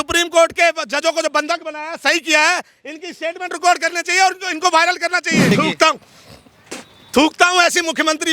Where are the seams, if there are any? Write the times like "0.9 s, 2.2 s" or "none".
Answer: 5.5 s

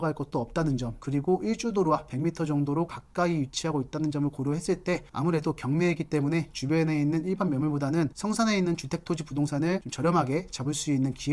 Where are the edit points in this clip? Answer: none

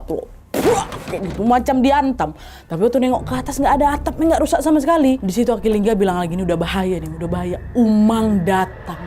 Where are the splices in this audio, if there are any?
5.2 s

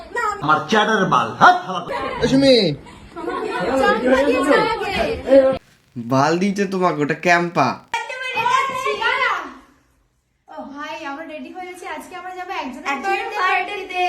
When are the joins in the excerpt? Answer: 8.0 s

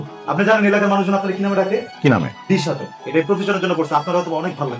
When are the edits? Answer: 1.9 s, 2.9 s

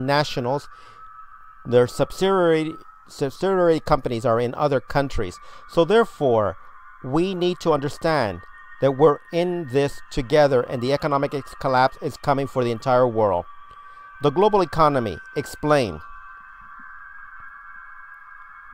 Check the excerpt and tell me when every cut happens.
7.8 s

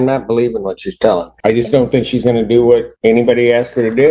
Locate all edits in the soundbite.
1.3 s, 2.9 s

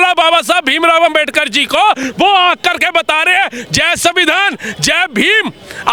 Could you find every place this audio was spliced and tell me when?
none

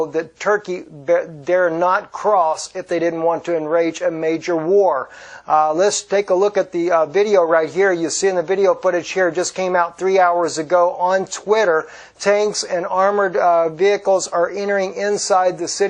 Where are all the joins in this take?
10.6 s

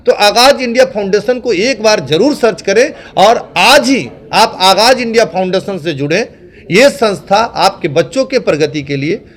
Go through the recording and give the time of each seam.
none

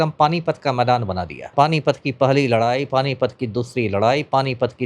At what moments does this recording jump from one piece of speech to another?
1.5 s

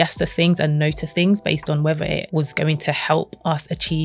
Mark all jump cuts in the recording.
2.3 s

